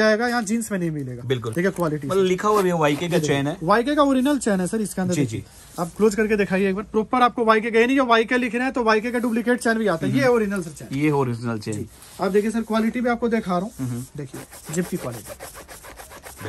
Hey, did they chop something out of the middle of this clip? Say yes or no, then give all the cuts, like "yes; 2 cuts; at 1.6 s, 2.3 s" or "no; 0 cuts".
no; 0 cuts